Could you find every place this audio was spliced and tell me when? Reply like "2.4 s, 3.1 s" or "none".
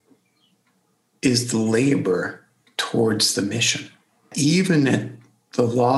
4.3 s